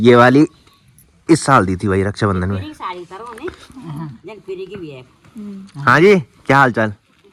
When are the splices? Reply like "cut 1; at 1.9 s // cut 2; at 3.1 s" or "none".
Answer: none